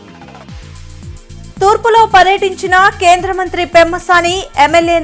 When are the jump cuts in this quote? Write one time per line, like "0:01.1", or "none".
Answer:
0:01.1